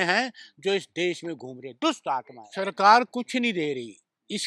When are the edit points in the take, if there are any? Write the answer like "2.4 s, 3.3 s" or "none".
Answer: 2.4 s

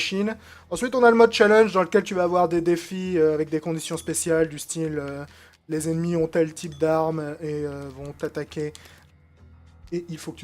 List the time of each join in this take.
6.5 s

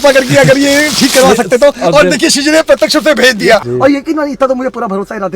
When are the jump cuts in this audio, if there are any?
3.6 s

